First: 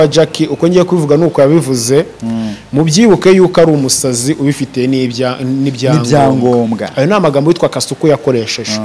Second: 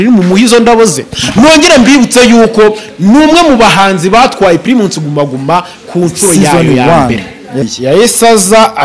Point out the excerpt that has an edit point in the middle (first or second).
second